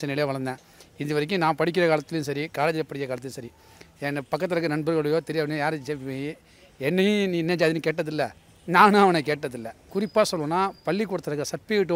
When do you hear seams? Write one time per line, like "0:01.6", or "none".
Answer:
0:09.8